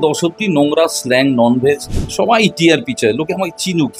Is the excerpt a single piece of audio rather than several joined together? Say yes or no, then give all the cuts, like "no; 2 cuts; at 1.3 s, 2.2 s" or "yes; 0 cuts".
no; 1 cut; at 1.9 s